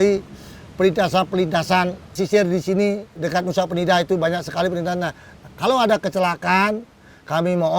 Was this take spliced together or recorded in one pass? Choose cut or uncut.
cut